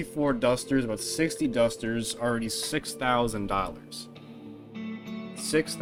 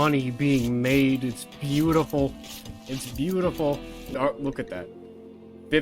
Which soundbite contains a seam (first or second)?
second